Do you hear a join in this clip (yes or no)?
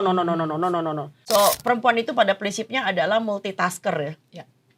yes